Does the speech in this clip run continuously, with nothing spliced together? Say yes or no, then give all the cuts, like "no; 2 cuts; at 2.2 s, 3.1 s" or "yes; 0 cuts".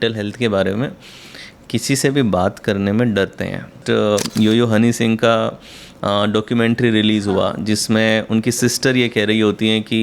no; 1 cut; at 3.8 s